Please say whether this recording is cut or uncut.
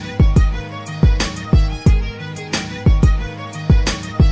uncut